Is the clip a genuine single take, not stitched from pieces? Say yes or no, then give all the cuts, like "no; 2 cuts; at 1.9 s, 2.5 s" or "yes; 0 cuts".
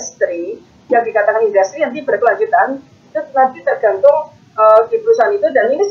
yes; 0 cuts